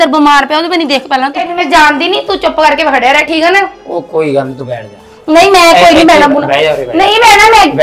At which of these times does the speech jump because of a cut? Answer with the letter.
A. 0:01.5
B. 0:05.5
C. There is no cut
A